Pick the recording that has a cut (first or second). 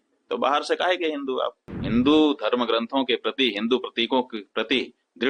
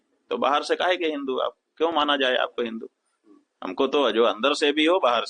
first